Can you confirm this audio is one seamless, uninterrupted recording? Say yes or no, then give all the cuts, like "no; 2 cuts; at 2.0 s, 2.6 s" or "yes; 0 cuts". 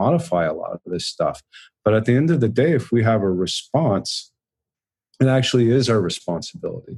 yes; 0 cuts